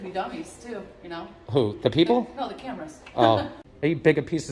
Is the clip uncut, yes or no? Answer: no